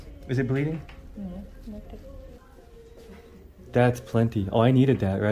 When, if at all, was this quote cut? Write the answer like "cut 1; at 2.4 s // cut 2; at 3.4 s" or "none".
cut 1; at 2.4 s